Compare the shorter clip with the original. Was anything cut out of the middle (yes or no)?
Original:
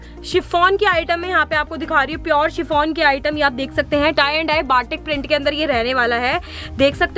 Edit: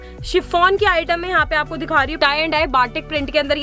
yes